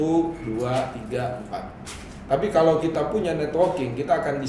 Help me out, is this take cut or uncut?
uncut